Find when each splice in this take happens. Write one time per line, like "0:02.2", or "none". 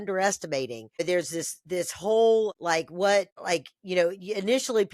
0:01.0
0:02.6
0:03.4